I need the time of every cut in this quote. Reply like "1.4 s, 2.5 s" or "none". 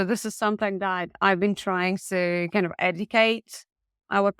none